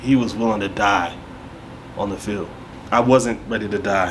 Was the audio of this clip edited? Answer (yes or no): yes